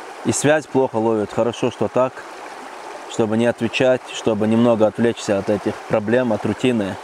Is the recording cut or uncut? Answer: uncut